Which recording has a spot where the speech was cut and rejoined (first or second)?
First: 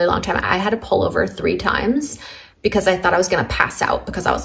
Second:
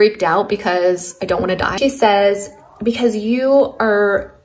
second